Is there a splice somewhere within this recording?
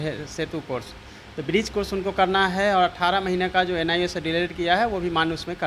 no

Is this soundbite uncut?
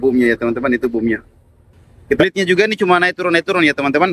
no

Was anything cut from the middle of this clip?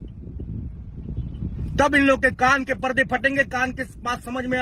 no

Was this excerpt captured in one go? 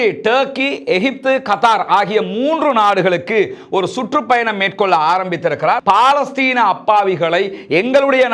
no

